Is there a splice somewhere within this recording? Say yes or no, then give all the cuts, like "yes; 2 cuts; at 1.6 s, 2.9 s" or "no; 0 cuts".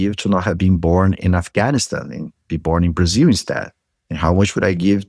no; 0 cuts